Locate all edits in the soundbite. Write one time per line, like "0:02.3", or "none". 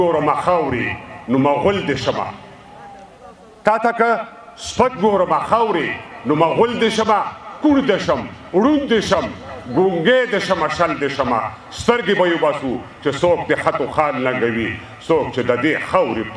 none